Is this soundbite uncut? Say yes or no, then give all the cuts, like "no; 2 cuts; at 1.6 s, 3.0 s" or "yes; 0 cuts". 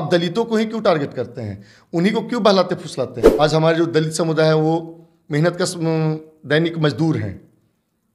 no; 1 cut; at 3.2 s